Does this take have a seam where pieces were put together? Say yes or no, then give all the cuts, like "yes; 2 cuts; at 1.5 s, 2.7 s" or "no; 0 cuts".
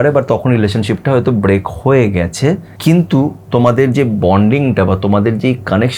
yes; 1 cut; at 2.7 s